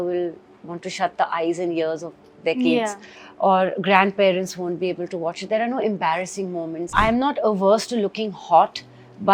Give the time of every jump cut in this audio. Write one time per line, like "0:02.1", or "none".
0:06.9